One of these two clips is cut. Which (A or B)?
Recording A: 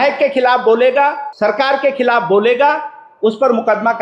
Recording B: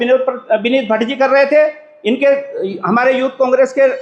A